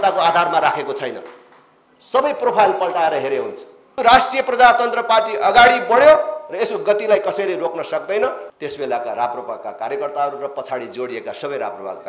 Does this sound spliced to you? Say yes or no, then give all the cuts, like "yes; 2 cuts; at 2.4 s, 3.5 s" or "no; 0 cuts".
yes; 2 cuts; at 3.9 s, 8.4 s